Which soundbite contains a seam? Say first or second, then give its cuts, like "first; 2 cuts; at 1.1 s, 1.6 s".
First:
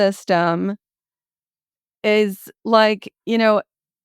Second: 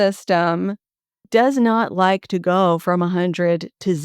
second; 1 cut; at 1.2 s